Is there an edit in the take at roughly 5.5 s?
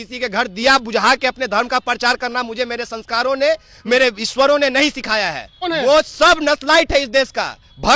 yes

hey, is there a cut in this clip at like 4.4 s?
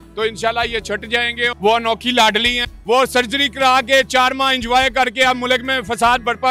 no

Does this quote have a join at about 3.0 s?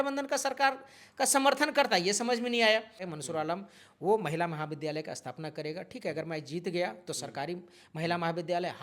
yes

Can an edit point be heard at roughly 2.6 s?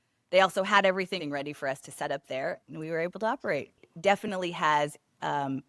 yes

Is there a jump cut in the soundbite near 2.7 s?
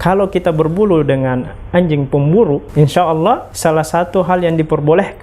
yes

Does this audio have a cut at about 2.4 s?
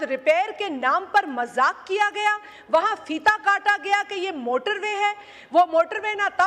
no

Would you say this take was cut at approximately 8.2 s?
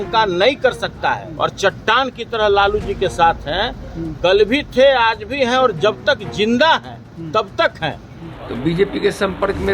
yes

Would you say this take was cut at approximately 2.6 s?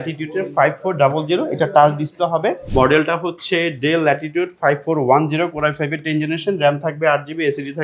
yes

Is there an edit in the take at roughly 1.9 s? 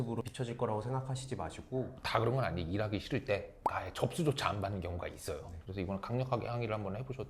yes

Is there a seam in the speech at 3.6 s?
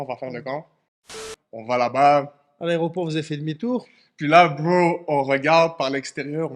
no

